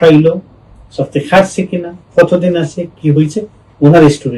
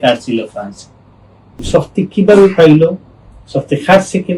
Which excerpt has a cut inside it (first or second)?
second